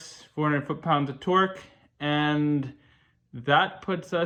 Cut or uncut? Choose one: uncut